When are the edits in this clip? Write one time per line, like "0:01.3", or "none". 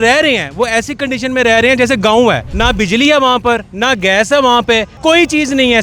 0:02.5
0:04.9